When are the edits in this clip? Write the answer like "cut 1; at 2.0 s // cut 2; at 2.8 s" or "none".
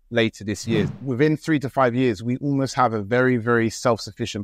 cut 1; at 0.9 s